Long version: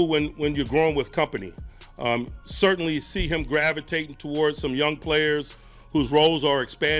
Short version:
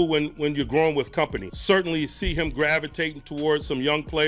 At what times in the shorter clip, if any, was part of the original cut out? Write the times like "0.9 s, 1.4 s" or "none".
1.5 s

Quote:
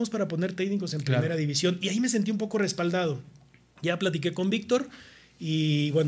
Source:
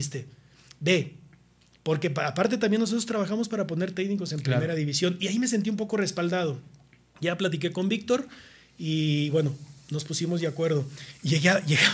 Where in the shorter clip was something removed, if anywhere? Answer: none

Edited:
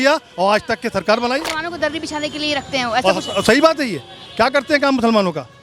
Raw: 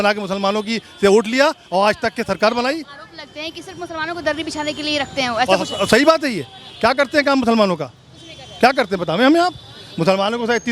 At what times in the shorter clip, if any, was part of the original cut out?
1.5 s

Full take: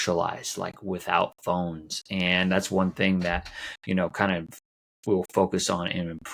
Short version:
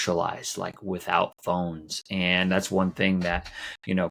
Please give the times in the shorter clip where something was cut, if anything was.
none

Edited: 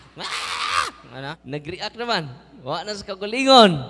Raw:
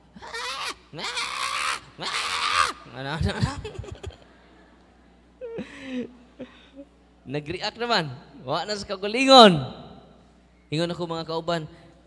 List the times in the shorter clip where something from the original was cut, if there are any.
1.4 s

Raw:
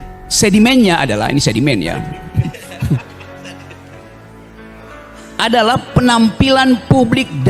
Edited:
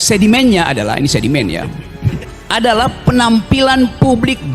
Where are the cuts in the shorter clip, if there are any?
2.3 s

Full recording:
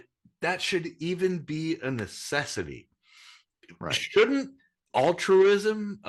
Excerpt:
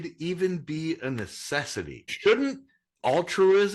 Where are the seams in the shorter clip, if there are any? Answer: 2.1 s

